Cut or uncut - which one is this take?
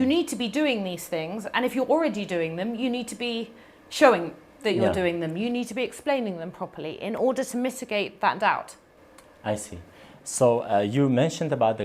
uncut